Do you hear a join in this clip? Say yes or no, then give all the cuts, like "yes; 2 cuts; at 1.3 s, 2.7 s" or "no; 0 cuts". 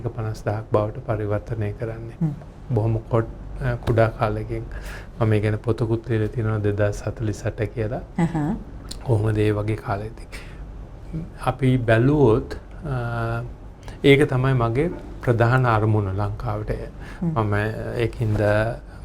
no; 0 cuts